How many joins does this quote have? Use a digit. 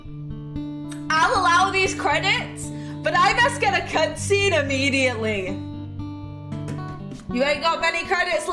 1